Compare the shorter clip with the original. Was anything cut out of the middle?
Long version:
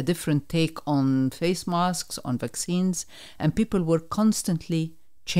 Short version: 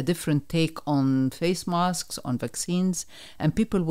no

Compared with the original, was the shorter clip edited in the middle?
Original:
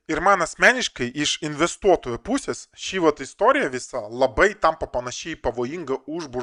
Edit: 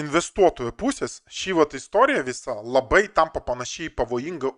no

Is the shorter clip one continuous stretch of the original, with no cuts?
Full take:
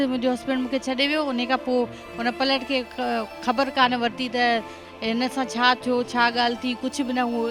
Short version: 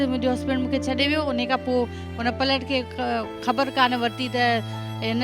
yes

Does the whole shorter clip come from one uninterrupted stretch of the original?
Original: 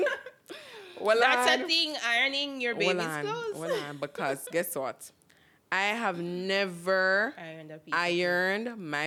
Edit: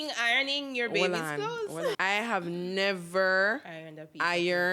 no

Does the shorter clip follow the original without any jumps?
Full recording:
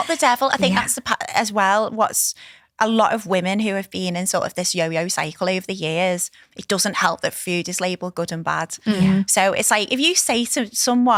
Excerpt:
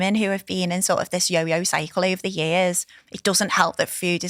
yes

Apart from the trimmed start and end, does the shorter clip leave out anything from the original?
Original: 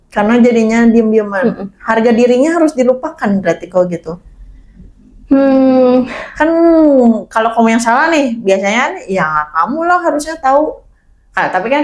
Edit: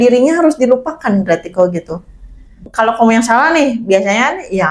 yes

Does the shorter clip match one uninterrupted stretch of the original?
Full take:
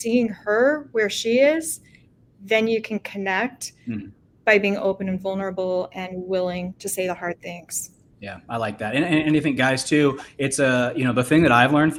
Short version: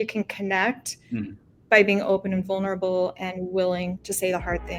yes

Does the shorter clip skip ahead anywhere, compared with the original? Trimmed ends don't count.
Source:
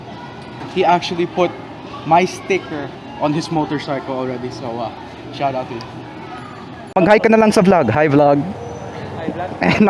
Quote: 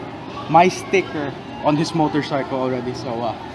no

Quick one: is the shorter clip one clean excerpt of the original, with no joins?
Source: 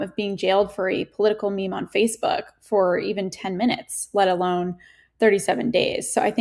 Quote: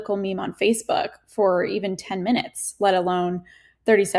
yes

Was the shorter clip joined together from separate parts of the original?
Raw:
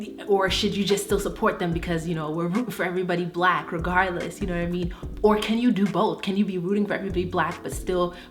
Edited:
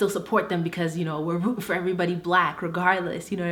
no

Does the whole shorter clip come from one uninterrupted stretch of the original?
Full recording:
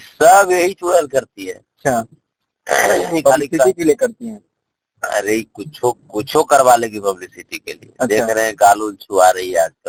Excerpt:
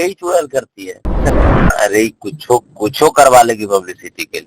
no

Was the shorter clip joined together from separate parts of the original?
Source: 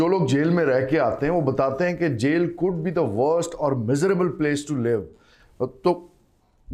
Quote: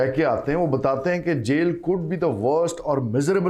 no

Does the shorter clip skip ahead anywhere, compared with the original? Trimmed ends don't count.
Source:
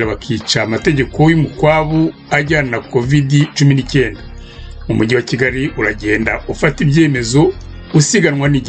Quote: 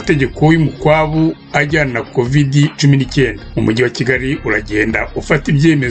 yes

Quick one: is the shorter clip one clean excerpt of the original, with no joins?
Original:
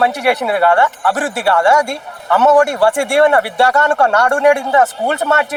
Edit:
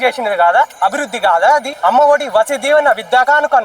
no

